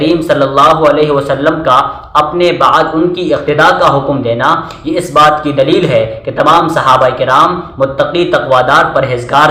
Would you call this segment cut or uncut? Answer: uncut